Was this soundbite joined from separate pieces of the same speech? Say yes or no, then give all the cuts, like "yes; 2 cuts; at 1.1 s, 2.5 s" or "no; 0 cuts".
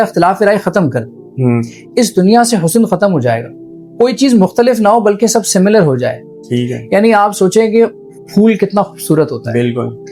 no; 0 cuts